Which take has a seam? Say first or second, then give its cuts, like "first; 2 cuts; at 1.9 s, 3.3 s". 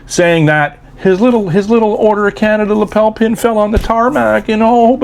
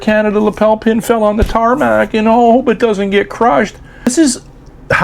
second; 1 cut; at 4.1 s